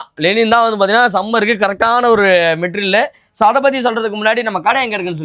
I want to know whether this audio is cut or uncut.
uncut